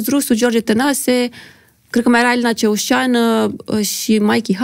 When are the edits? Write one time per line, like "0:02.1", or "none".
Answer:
none